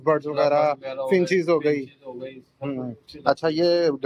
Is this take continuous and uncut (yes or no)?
yes